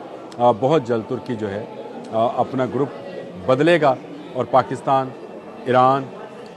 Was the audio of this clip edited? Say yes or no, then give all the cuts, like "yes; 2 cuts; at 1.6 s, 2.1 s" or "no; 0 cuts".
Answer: no; 0 cuts